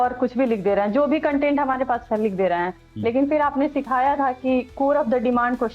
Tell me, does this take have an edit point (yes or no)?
no